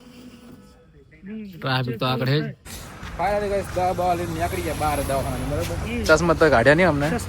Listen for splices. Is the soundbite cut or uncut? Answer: cut